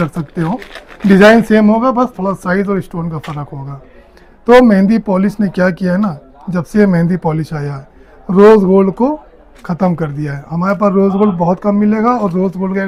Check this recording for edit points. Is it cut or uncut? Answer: uncut